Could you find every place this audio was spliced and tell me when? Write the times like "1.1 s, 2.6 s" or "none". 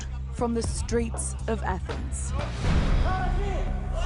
1.6 s